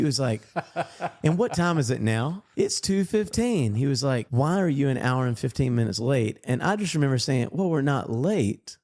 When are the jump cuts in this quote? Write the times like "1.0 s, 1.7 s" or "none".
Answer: none